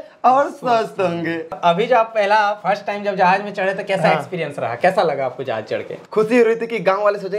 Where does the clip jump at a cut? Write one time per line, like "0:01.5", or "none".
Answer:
0:01.6
0:06.0